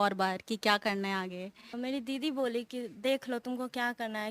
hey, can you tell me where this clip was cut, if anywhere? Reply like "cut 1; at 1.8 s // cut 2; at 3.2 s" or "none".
cut 1; at 1.7 s